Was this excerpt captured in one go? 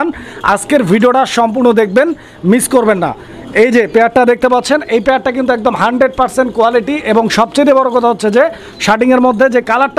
yes; 0 cuts

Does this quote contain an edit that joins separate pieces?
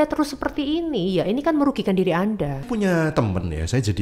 yes; 1 cut; at 2.6 s

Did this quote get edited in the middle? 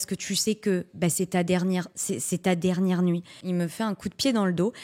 yes; 1 cut; at 3.4 s

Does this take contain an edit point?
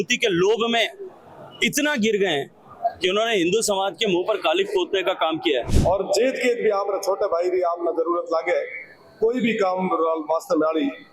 yes; 1 cut; at 5.7 s

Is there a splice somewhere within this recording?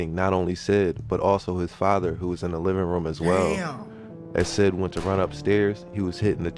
no; 0 cuts

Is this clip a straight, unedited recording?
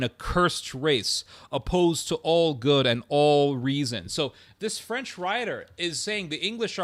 yes; 0 cuts

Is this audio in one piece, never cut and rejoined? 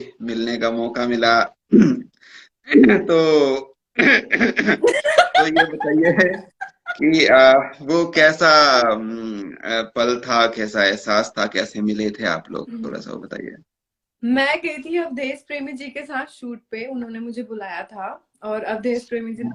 yes; 0 cuts

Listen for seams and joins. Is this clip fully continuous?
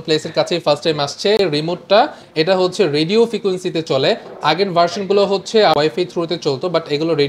no; 2 cuts; at 1.4 s, 5.8 s

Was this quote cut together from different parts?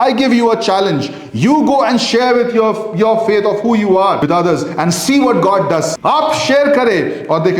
yes; 2 cuts; at 4.2 s, 5.9 s

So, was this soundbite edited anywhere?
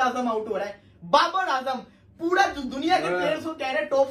no; 0 cuts

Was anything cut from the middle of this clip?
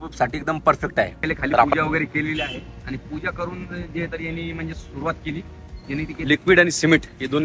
yes; 2 cuts; at 1.7 s, 6.2 s

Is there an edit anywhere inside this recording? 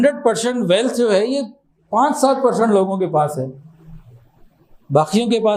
no; 0 cuts

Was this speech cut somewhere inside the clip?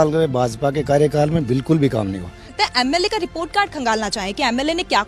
yes; 1 cut; at 2.5 s

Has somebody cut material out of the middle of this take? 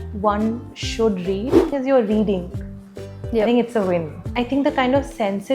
yes; 2 cuts; at 1.7 s, 4.2 s

